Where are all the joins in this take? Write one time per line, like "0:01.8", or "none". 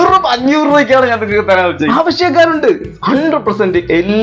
0:01.8